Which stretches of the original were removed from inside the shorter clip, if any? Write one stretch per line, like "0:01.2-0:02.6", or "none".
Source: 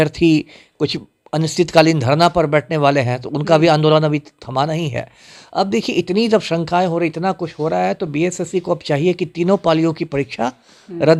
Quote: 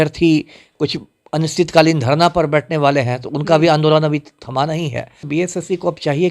0:05.2-0:08.1